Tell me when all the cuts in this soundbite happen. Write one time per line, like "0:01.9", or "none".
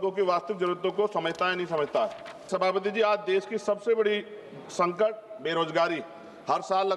0:02.4